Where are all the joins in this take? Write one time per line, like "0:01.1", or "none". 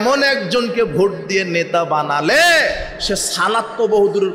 none